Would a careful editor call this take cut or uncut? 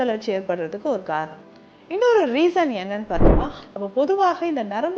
cut